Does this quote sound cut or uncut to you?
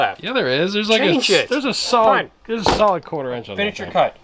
uncut